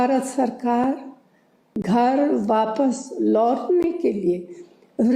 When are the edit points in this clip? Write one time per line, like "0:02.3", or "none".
0:01.7